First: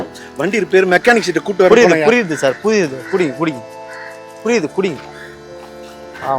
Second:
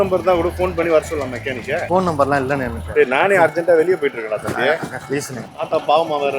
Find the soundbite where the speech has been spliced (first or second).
second